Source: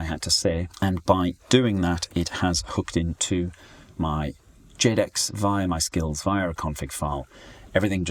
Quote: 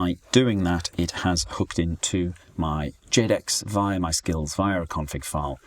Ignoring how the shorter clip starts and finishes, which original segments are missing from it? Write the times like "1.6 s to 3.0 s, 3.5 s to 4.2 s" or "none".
3.9 s to 4.4 s

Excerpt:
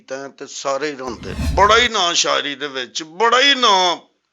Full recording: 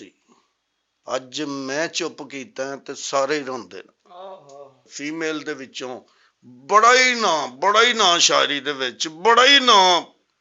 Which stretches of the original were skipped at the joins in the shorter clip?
3.9 s to 7.5 s

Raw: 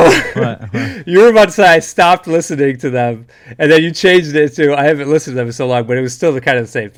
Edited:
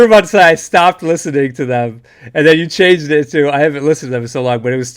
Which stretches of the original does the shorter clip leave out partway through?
none

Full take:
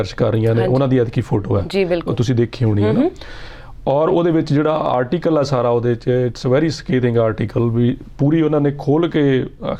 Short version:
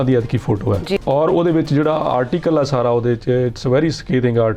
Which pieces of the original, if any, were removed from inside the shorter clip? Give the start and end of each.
1.8 s to 3.8 s

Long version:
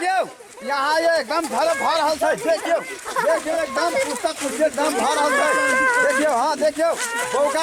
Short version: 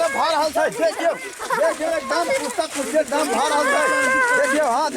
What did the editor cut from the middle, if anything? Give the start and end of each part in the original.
none

